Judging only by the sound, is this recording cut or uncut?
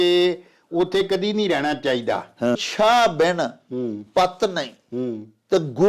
cut